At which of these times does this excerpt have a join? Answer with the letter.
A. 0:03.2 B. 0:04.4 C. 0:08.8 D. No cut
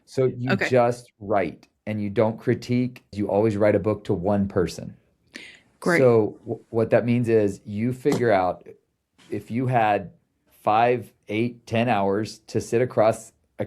A